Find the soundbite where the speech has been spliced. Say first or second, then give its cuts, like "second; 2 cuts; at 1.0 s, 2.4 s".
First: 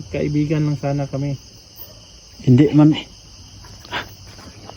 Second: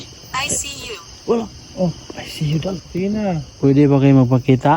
second; 1 cut; at 2.8 s